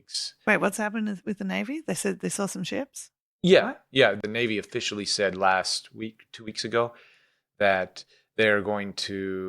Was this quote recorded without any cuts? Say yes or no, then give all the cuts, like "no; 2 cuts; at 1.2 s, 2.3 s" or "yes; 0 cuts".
no; 1 cut; at 4.1 s